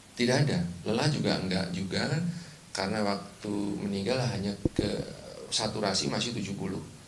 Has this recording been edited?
yes; 1 cut; at 4.8 s

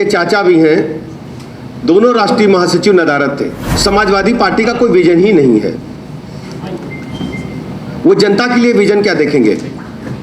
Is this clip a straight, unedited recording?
no; 1 cut; at 3.7 s

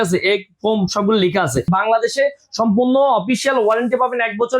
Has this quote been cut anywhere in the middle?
yes; 1 cut; at 1.7 s

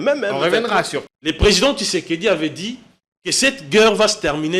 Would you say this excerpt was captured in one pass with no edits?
no; 1 cut; at 1.0 s

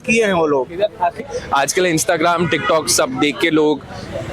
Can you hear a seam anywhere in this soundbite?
yes; 1 cut; at 1.2 s

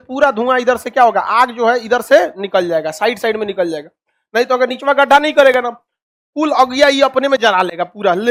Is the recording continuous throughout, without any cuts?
yes; 0 cuts

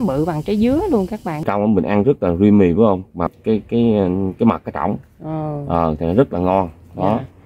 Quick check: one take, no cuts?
no; 2 cuts; at 1.3 s, 3.3 s

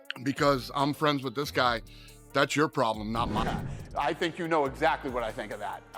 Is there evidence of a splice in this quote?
yes; 1 cut; at 3.4 s

